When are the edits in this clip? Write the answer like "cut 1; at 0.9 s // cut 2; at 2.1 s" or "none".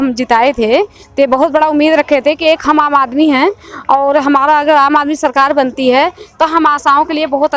none